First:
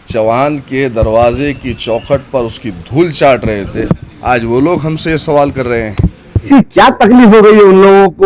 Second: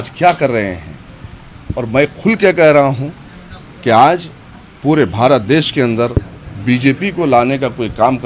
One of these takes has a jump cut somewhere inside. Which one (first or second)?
first